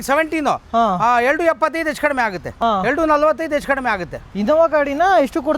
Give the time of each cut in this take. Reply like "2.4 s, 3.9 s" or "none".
2.5 s, 4.2 s